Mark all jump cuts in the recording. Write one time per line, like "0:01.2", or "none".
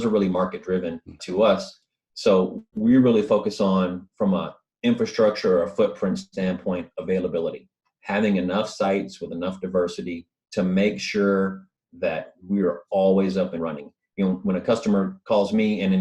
0:01.1